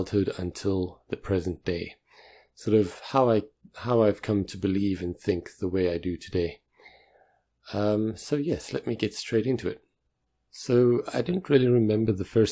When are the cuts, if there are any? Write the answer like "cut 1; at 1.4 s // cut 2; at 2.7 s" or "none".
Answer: cut 1; at 4.7 s